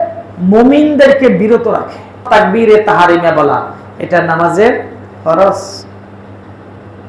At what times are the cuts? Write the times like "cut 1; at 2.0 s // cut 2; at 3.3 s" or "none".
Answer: cut 1; at 2.3 s